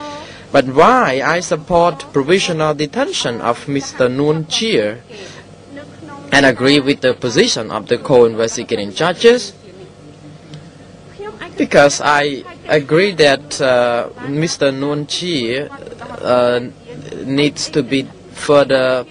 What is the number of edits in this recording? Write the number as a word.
one